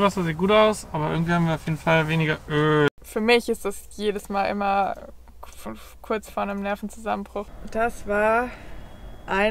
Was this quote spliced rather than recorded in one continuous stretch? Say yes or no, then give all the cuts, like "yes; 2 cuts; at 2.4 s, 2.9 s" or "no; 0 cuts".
yes; 2 cuts; at 2.9 s, 7.5 s